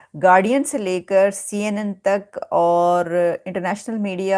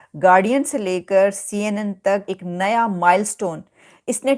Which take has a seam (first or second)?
second